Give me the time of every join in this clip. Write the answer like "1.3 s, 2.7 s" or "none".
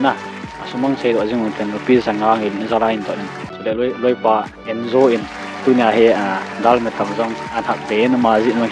3.5 s

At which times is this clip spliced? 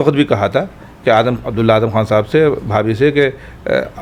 none

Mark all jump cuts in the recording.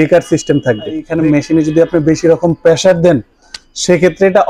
1.1 s

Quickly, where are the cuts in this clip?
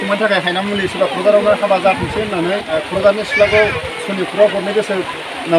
2.8 s

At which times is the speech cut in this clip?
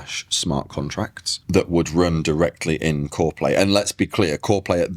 none

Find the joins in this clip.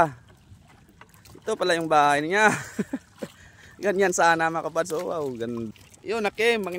5.7 s

